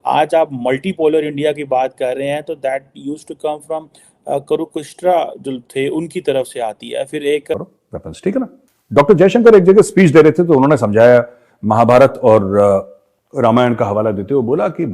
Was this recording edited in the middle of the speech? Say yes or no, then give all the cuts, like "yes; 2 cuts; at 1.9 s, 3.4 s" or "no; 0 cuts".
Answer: yes; 1 cut; at 7.5 s